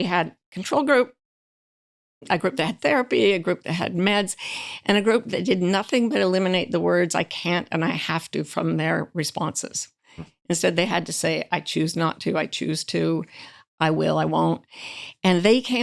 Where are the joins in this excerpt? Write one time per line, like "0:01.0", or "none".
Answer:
none